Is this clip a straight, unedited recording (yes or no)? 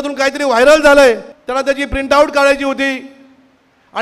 no